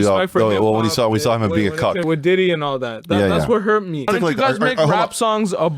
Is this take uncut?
no; 2 cuts; at 2.0 s, 4.1 s

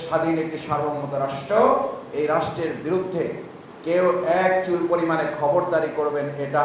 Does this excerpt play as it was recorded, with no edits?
yes; 0 cuts

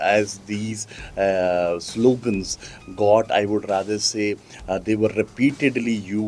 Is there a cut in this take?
no; 0 cuts

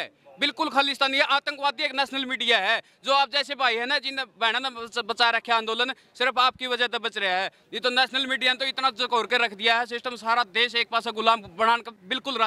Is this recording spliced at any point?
no; 0 cuts

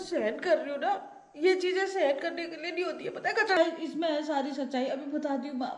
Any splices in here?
yes; 1 cut; at 3.6 s

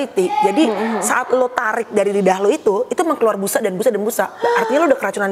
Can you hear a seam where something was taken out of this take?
no; 0 cuts

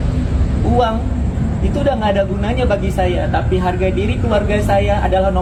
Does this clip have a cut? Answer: no; 0 cuts

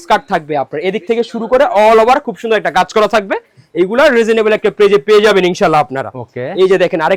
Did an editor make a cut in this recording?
no; 0 cuts

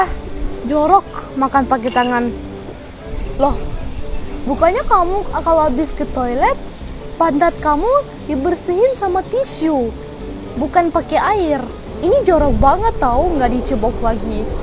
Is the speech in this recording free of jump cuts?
yes; 0 cuts

